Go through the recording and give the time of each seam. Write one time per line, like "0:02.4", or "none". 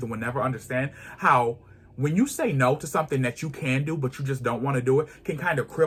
none

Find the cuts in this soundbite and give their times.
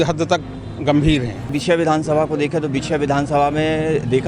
0:01.6

